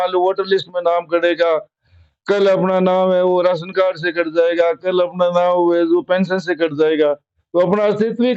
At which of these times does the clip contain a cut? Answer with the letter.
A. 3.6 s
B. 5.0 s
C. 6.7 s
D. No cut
D